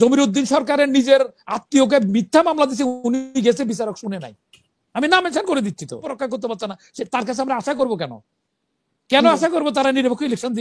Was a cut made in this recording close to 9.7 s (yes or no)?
no